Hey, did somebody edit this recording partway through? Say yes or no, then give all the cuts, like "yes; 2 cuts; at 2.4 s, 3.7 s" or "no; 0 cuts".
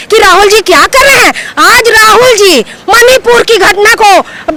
no; 0 cuts